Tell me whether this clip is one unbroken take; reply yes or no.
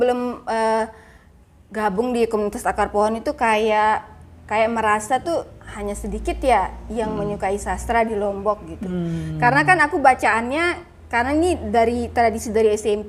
yes